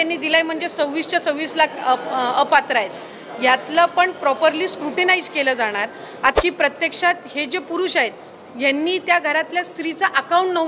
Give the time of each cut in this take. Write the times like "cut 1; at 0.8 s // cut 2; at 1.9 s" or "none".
cut 1; at 6.3 s